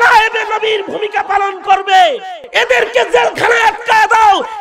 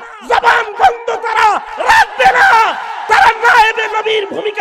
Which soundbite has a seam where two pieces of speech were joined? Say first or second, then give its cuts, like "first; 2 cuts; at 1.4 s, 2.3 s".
first; 1 cut; at 2.4 s